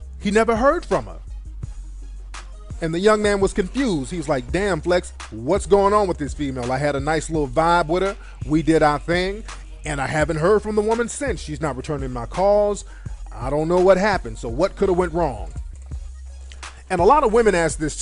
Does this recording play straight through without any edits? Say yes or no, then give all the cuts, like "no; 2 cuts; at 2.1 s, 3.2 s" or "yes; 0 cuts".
yes; 0 cuts